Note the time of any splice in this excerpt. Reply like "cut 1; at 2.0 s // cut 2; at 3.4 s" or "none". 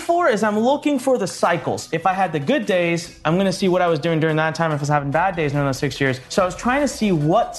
cut 1; at 1.8 s // cut 2; at 6.2 s